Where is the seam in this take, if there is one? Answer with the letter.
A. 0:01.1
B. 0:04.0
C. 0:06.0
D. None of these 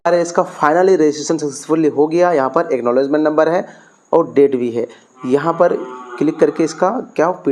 D